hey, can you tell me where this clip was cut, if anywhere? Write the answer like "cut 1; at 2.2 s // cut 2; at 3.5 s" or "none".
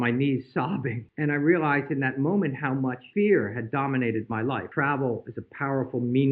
cut 1; at 1.0 s // cut 2; at 3.0 s // cut 3; at 4.7 s